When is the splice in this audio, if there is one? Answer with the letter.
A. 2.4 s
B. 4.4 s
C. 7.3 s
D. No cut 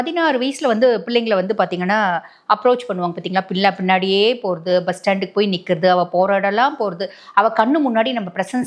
D